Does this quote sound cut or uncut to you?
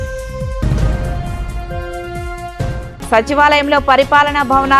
cut